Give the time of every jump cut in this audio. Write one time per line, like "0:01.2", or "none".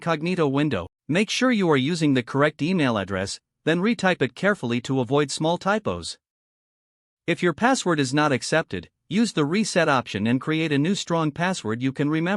0:00.9